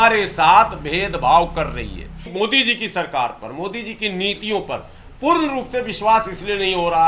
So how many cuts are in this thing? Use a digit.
1